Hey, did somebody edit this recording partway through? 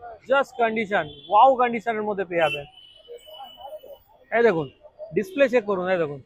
no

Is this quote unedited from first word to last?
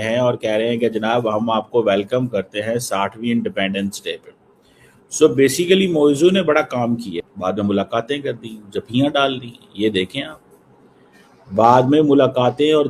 yes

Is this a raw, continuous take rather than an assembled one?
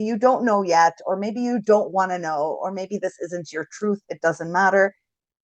yes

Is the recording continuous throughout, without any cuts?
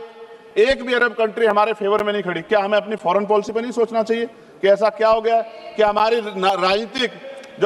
yes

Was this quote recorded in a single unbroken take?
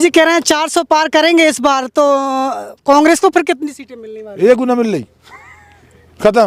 yes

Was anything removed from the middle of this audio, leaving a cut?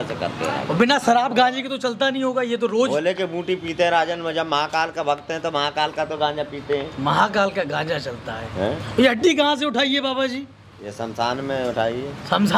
no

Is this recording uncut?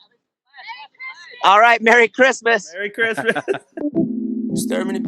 no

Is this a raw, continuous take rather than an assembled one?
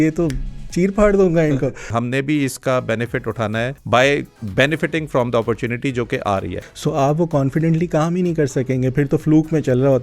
no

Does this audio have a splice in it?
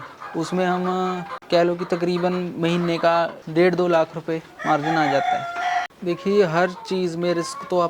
yes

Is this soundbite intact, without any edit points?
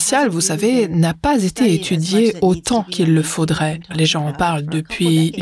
no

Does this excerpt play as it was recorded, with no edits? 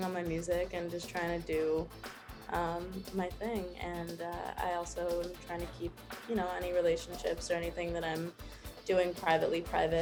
yes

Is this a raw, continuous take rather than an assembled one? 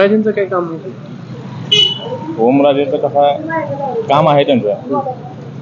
yes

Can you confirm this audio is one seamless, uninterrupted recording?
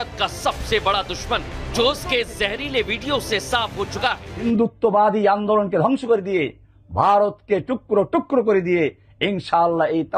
no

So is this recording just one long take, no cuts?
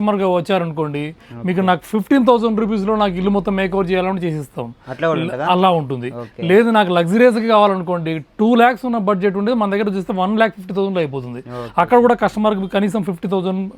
yes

